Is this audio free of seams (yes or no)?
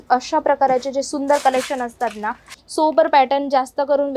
no